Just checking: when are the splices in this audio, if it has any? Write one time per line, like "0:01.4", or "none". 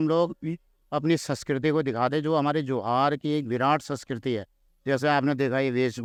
none